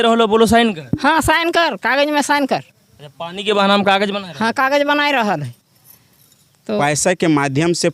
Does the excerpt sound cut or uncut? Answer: cut